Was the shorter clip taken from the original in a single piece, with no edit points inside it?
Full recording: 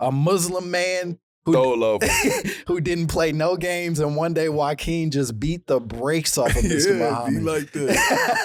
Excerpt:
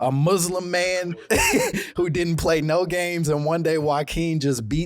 no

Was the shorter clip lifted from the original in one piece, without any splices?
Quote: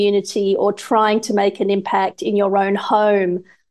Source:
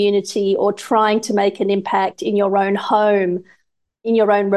yes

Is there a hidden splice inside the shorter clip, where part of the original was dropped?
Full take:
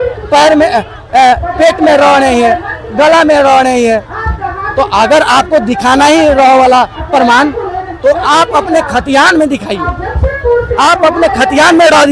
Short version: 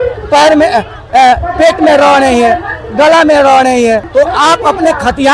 yes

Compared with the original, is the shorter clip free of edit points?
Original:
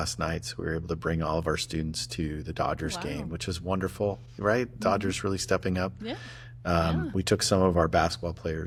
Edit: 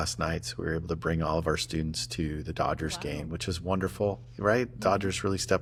yes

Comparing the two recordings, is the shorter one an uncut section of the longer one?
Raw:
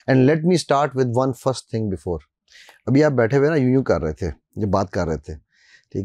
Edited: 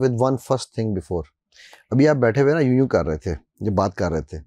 yes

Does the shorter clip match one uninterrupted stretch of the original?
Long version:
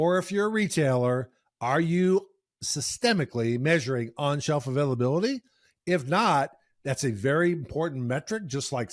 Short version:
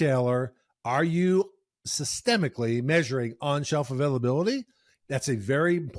no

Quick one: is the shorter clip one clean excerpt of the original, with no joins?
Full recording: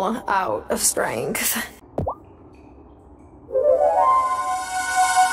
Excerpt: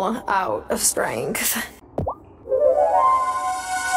no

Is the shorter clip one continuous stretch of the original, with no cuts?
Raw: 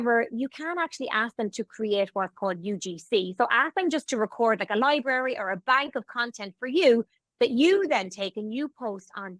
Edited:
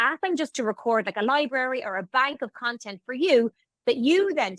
yes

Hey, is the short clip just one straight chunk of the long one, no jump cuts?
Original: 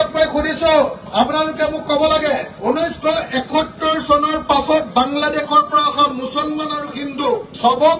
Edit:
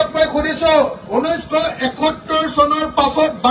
no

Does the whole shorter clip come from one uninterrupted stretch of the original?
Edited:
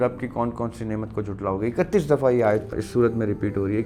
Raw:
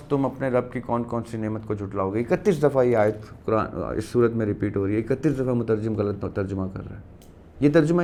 no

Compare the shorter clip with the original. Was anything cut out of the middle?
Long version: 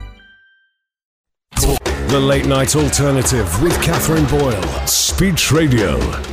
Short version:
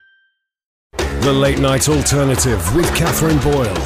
yes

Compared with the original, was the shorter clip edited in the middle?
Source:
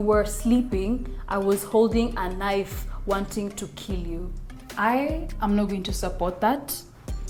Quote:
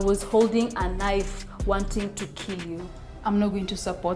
yes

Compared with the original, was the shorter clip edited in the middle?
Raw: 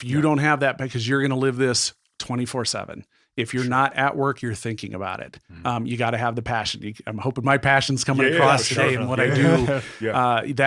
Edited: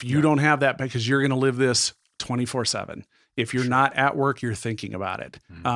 no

